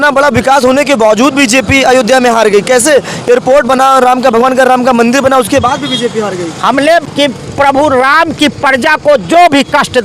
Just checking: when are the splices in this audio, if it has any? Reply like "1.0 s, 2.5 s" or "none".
7.0 s

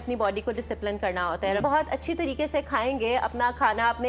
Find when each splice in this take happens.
1.6 s

